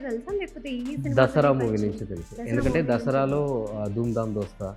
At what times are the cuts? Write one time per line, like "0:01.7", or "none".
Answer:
none